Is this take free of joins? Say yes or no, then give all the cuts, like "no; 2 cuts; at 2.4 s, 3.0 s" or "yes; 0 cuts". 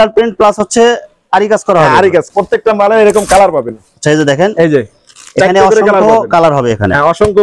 no; 1 cut; at 2.3 s